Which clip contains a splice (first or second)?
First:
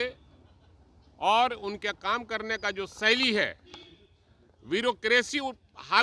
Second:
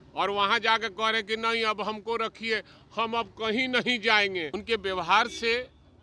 second